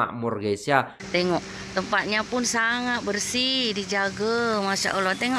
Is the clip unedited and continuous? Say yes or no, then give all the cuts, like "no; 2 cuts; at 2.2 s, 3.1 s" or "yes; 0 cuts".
no; 1 cut; at 1.0 s